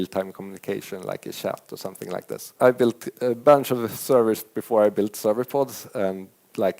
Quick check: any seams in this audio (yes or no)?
yes